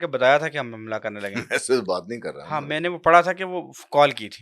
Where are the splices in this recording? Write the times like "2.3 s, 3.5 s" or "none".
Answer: none